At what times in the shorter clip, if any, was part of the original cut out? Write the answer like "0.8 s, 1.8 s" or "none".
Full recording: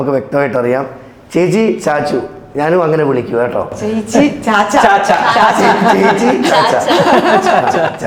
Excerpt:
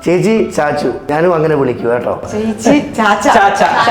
1.0 s